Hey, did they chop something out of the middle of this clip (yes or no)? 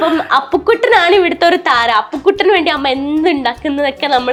no